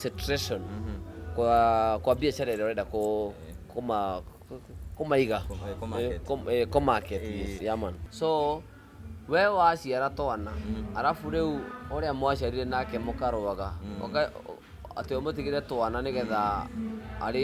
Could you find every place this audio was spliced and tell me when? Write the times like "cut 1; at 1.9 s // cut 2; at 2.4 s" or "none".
cut 1; at 8.0 s